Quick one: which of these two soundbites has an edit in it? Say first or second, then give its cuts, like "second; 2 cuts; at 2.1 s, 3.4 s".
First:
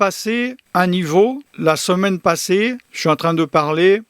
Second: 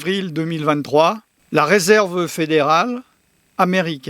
second; 1 cut; at 1.4 s